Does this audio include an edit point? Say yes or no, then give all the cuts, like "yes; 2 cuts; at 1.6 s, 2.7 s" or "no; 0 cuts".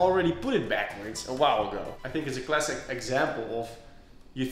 yes; 1 cut; at 1.9 s